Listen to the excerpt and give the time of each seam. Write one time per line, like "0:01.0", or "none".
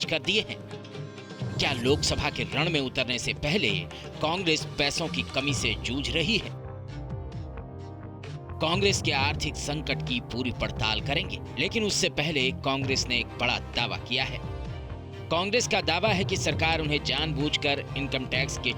0:06.4
0:08.6